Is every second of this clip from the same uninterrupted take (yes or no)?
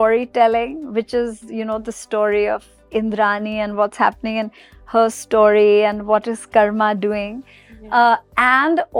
yes